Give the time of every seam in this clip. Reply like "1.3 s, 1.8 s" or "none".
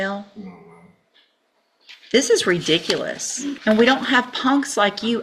3.5 s